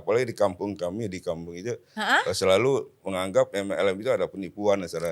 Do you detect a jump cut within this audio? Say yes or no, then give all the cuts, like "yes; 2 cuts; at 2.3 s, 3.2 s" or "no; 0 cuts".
no; 0 cuts